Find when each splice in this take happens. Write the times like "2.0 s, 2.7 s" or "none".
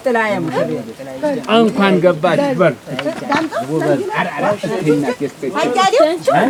none